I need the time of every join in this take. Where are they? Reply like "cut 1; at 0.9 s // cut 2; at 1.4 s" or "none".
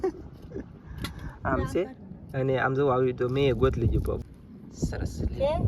cut 1; at 4.2 s